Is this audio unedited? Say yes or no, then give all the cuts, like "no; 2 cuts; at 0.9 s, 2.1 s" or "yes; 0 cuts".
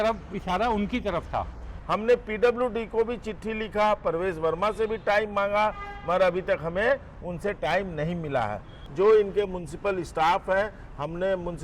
no; 2 cuts; at 1.7 s, 8.8 s